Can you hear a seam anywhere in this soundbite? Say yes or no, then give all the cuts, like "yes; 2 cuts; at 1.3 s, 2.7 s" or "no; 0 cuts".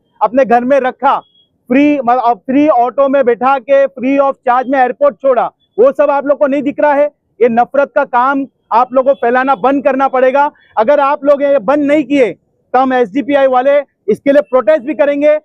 no; 0 cuts